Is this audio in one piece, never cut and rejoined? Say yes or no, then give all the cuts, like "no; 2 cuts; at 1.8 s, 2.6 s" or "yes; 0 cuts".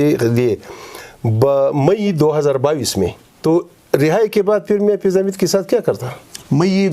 no; 1 cut; at 3.3 s